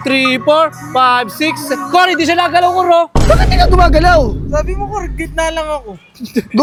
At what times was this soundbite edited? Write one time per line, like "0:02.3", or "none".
none